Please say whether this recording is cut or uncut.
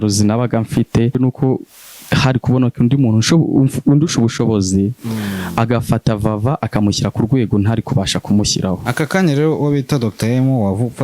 cut